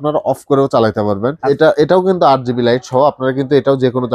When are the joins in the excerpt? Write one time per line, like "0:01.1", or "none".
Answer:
0:01.4